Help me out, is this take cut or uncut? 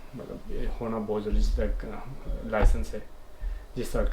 uncut